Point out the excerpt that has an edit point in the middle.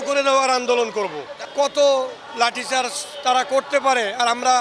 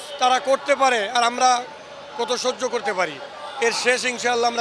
first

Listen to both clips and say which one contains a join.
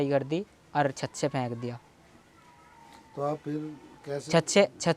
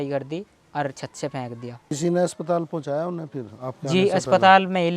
second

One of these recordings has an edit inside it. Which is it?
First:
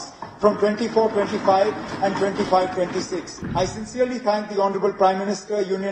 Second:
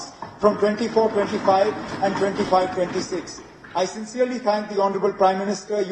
first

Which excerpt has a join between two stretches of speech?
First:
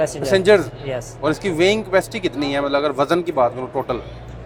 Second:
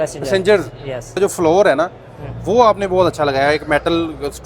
second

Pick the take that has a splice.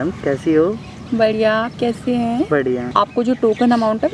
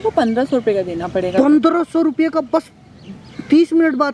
first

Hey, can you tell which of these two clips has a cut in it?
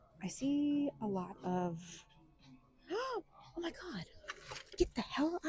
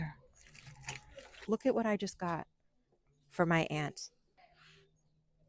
second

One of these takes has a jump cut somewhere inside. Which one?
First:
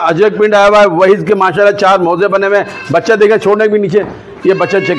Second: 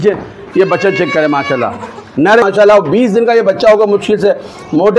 second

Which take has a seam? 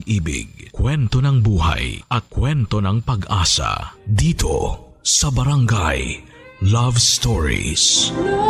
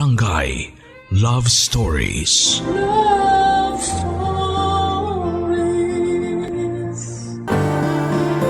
second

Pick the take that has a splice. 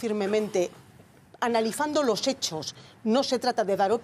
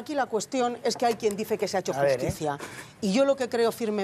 first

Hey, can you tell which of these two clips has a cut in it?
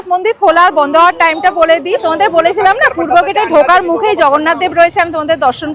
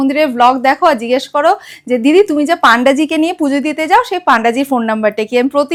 first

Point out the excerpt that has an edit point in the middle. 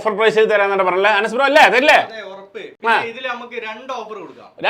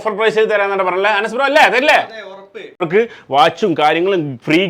second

